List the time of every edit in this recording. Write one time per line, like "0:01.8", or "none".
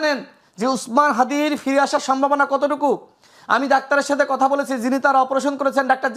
none